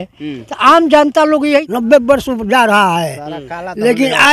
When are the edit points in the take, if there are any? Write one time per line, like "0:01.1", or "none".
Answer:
0:01.7